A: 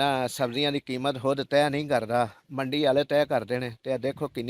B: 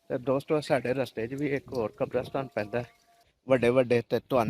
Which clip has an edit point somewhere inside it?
B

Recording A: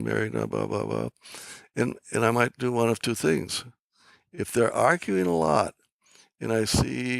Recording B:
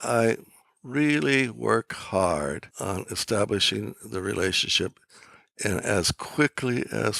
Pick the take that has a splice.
B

